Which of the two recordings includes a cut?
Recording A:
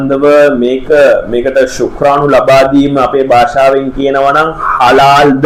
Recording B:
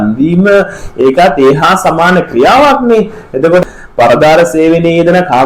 B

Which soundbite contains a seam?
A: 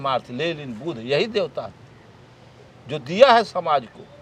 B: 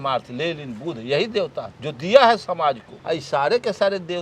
B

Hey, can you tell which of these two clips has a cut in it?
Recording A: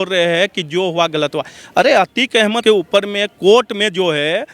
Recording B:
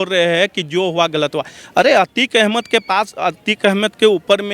A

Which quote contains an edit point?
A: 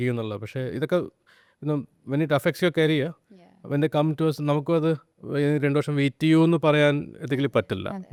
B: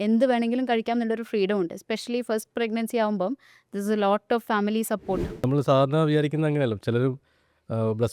B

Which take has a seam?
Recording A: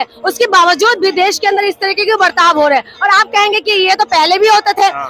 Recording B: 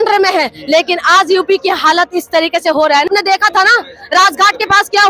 B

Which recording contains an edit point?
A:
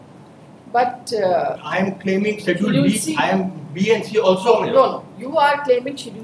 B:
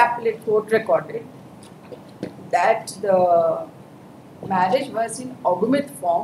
A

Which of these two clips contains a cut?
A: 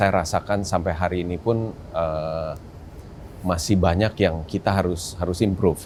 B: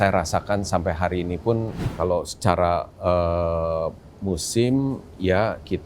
B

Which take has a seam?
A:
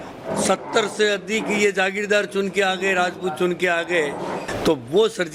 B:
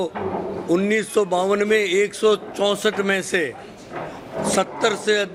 A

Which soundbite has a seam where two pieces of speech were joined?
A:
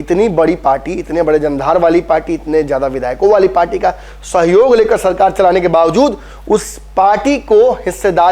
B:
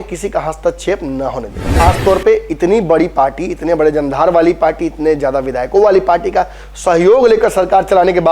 B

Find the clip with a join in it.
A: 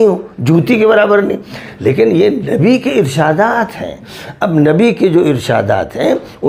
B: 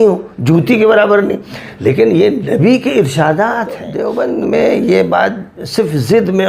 B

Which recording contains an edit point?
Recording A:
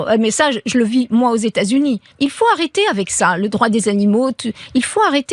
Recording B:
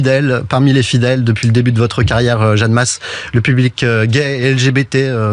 A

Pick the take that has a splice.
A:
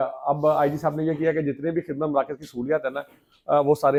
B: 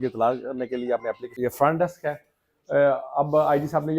B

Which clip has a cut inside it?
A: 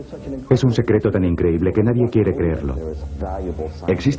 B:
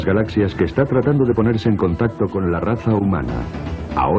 B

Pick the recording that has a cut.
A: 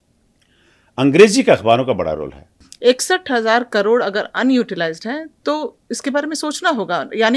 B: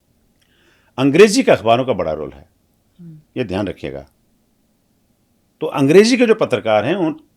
A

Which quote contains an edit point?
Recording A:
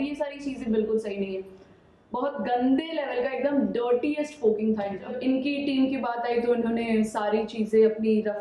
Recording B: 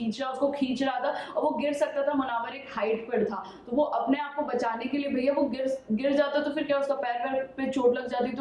A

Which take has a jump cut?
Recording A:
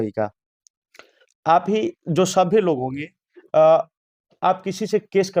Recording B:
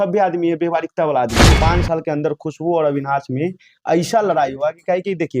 B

